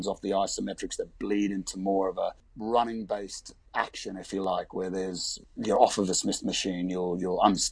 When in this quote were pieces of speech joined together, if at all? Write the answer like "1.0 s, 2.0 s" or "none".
2.5 s, 3.6 s, 5.3 s

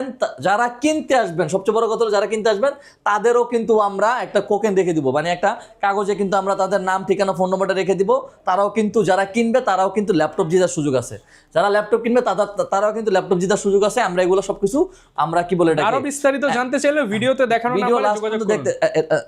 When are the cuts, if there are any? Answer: none

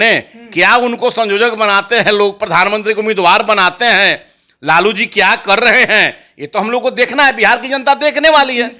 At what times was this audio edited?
none

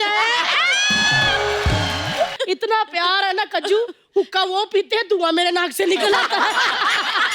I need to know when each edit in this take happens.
2.4 s

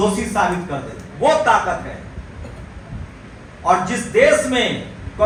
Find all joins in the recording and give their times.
none

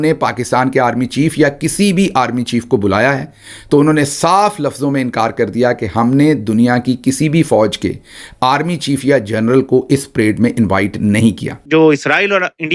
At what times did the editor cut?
11.5 s

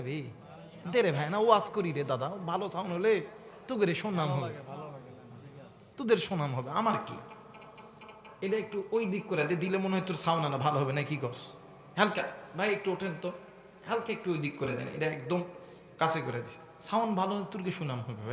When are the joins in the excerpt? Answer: none

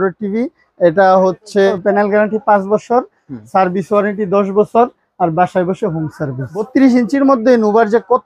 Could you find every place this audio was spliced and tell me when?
1.7 s, 6.7 s

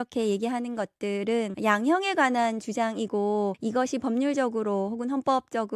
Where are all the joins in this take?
1.5 s, 3.6 s

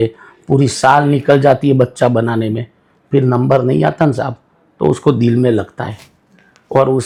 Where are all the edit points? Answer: none

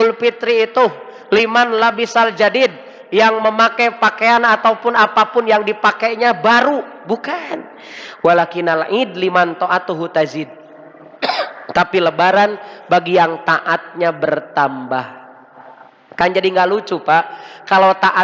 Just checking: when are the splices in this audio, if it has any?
none

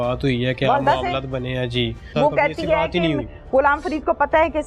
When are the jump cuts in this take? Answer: 2.1 s

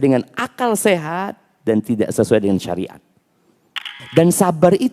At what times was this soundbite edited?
4.0 s

